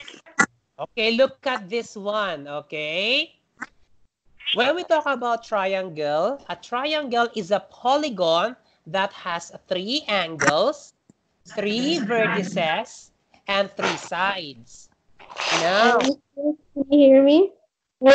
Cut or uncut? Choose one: uncut